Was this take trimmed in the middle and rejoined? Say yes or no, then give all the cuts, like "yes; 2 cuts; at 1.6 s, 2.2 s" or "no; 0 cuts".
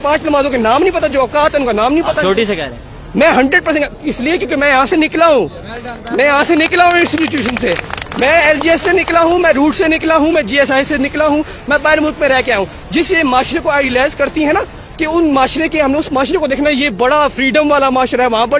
no; 0 cuts